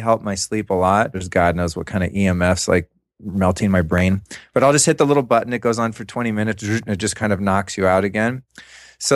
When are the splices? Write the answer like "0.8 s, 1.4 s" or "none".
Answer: 1.2 s